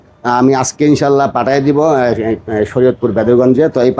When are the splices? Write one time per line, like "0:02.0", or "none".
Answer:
none